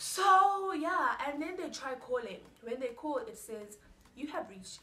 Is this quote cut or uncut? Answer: uncut